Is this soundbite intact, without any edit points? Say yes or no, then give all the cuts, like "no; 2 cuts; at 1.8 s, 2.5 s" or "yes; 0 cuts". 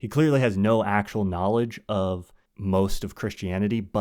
no; 1 cut; at 2.4 s